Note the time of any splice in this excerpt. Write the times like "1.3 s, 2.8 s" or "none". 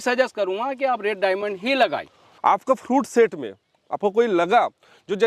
2.2 s